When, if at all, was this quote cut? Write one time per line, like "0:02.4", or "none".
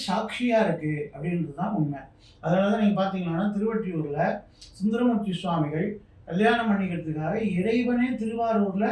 none